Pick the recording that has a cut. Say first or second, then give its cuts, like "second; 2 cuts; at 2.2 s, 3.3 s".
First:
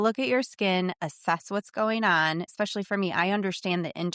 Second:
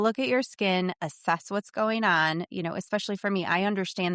first; 1 cut; at 2.5 s